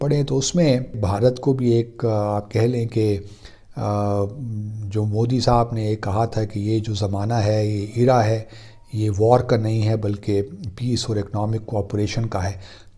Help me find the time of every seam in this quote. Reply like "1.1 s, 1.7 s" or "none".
1.0 s